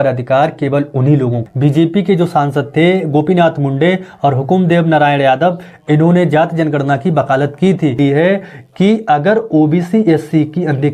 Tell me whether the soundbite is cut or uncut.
cut